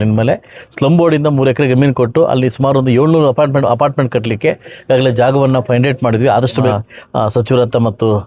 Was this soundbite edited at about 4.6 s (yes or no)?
no